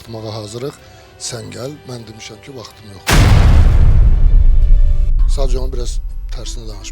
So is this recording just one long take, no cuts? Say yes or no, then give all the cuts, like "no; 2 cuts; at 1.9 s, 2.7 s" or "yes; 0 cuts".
yes; 0 cuts